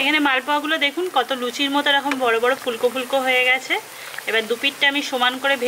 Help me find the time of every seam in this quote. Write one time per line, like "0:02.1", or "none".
none